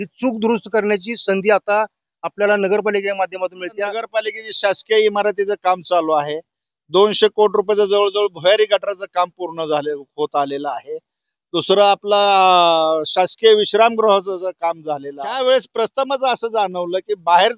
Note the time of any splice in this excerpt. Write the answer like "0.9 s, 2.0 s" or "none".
4.0 s, 15.3 s